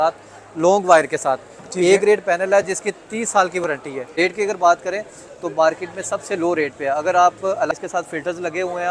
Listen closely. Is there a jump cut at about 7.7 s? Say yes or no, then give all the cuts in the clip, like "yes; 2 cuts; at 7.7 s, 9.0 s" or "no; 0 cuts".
yes; 2 cuts; at 4.0 s, 7.7 s